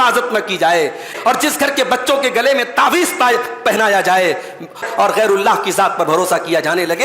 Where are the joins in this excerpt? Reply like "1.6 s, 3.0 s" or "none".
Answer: 1.1 s, 4.8 s